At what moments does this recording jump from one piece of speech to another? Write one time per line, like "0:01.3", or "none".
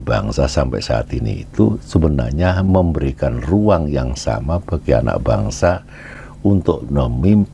none